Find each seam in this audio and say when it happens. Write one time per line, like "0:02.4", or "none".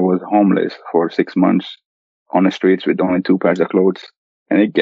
none